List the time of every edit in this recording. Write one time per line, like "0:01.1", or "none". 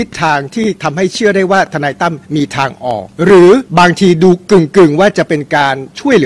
0:02.2
0:03.1
0:03.7

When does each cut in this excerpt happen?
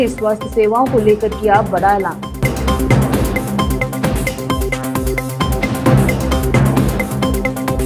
none

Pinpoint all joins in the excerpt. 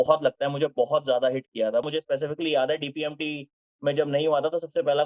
0:01.8

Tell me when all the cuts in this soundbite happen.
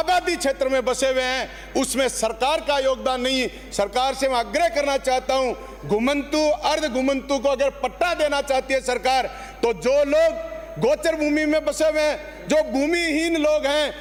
none

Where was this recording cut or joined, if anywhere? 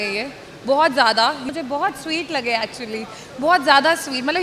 0:01.5

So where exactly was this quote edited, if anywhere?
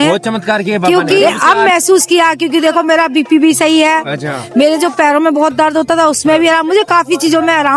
0:01.2

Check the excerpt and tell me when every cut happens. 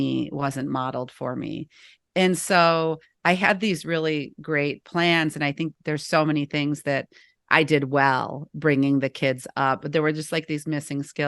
none

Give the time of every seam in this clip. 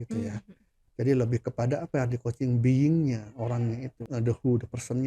0:04.0

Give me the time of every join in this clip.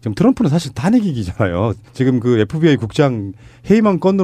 none

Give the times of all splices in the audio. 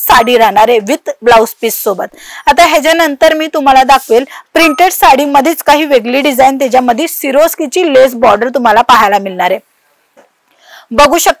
none

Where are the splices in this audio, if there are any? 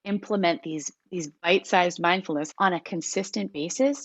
0:02.5

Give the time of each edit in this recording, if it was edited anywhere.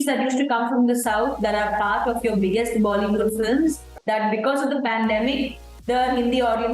0:03.9

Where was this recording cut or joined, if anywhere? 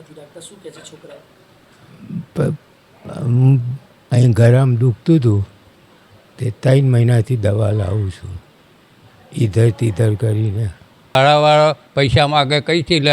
0:11.1

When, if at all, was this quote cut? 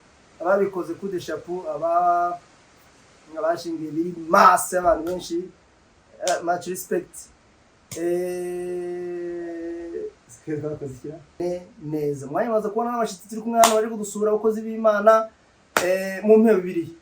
0:11.4

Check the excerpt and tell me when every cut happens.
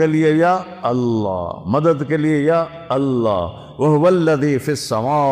none

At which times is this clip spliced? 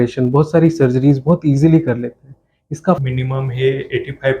0:03.0

